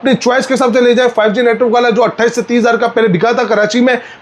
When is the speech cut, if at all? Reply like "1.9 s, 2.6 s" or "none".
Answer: none